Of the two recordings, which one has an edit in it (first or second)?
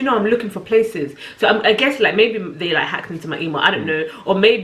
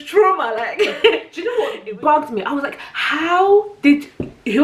second